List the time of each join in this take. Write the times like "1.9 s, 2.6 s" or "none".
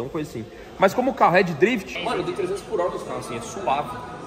1.9 s